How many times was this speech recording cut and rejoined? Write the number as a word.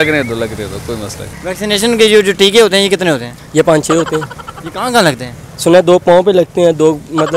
one